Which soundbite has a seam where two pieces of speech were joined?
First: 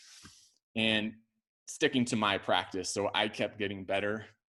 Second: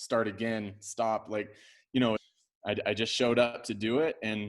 second; 1 cut; at 2.3 s

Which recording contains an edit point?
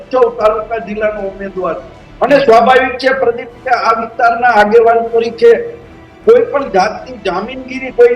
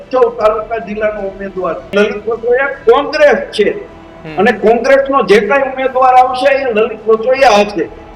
second; 1 cut; at 1.9 s

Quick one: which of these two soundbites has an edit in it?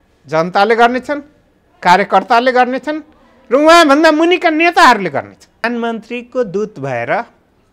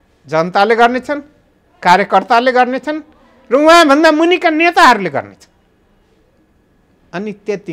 first; 1 cut; at 5.6 s

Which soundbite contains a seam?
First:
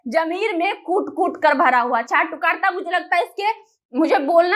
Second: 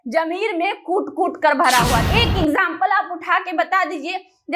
second; 1 cut; at 2.1 s

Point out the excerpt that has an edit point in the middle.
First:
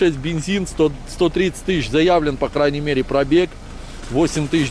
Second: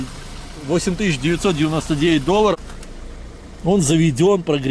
second; 1 cut; at 2.5 s

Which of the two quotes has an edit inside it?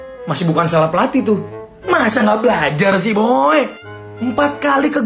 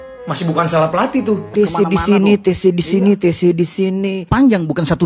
second; 2 cuts; at 1.5 s, 4.3 s

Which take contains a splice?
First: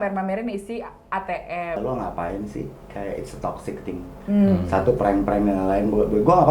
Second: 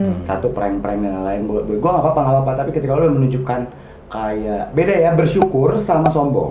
first; 1 cut; at 1.8 s

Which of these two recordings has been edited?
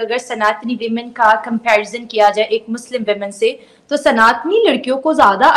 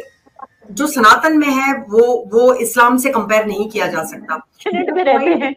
second; 1 cut; at 4.6 s

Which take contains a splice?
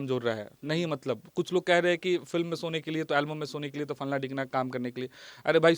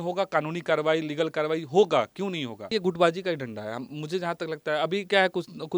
second; 1 cut; at 2.7 s

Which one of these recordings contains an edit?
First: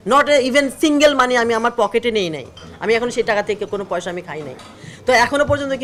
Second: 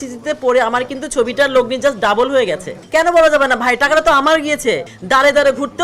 second; 2 cuts; at 2.7 s, 4.9 s

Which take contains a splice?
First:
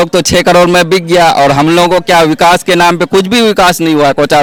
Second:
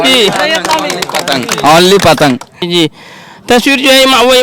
second; 1 cut; at 2.5 s

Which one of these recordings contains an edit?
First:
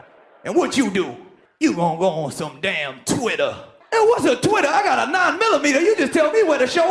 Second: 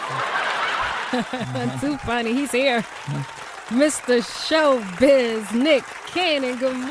second; 1 cut; at 5.5 s

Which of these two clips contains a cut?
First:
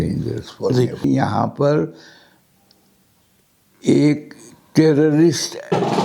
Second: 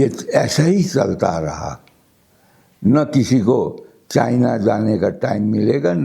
first; 1 cut; at 1.0 s

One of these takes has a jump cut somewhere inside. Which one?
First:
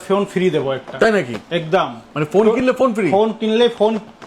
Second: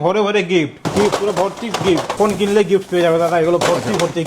second; 2 cuts; at 0.8 s, 2.1 s

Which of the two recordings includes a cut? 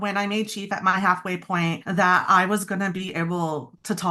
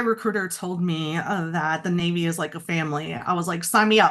first; 1 cut; at 1.8 s

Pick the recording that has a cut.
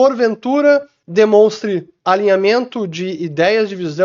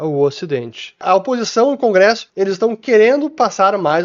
second; 2 cuts; at 1.0 s, 2.3 s

